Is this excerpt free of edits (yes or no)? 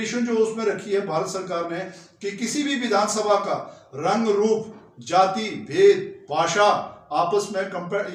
yes